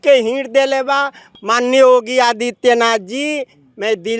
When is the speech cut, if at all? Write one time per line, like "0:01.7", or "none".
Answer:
0:01.2